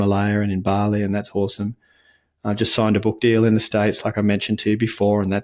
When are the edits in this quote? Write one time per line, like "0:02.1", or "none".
none